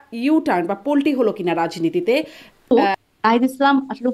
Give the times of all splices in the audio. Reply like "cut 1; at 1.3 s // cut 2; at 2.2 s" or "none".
cut 1; at 2.7 s

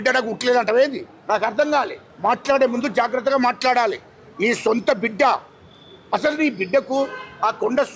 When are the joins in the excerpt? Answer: none

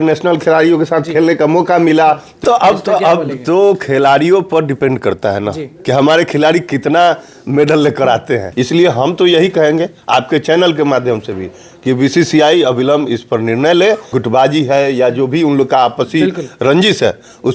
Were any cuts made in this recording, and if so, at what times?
cut 1; at 2.4 s // cut 2; at 8.5 s // cut 3; at 14.1 s

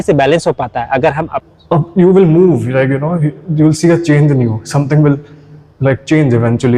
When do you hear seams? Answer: cut 1; at 1.3 s

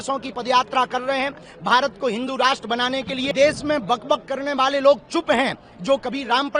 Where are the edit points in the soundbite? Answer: cut 1; at 3.3 s

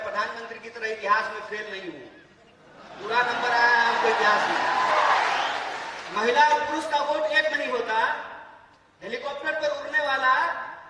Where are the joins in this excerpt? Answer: cut 1; at 4.9 s

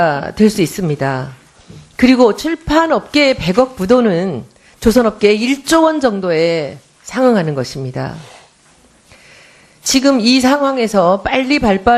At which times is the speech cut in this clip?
cut 1; at 2.4 s

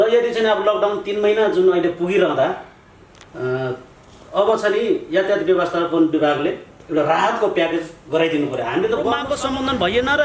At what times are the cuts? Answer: cut 1; at 9.2 s

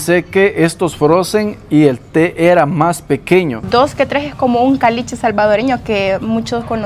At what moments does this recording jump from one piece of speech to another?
cut 1; at 3.6 s

